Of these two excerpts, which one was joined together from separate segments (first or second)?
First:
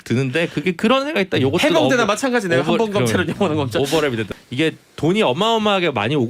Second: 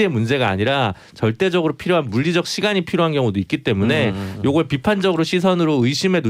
first